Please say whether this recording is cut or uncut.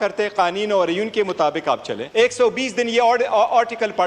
cut